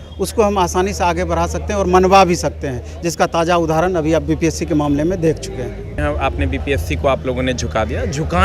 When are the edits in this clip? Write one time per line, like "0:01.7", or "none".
0:05.9